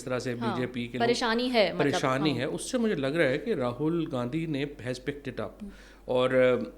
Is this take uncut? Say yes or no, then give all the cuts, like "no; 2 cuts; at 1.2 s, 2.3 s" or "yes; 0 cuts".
yes; 0 cuts